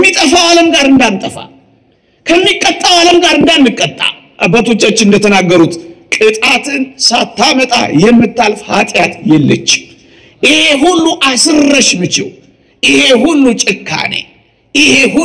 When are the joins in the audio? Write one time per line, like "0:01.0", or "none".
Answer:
none